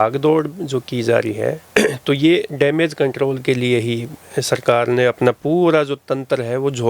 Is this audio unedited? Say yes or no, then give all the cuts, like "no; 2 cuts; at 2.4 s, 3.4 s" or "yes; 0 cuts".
yes; 0 cuts